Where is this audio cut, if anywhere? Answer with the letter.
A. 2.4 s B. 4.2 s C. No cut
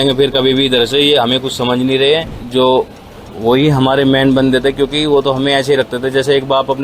A